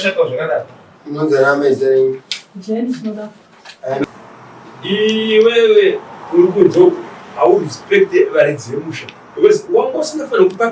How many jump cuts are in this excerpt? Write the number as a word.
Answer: one